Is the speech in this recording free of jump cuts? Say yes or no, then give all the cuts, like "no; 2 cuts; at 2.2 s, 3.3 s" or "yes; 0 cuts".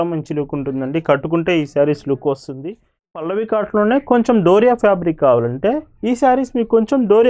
no; 1 cut; at 3.1 s